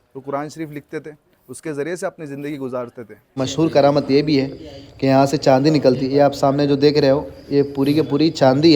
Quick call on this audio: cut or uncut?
cut